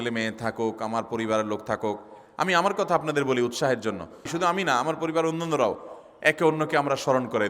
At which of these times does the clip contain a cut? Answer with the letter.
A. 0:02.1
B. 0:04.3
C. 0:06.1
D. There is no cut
B